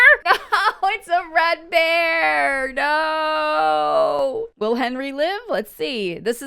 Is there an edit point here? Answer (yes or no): yes